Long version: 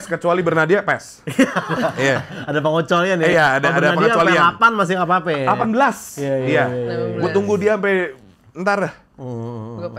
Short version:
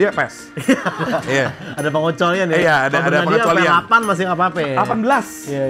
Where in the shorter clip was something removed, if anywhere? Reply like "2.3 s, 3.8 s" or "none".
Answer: none